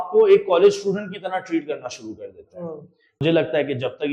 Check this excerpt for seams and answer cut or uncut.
cut